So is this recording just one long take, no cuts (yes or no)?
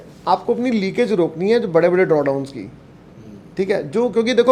yes